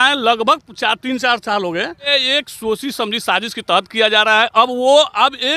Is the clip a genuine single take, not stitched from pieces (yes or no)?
no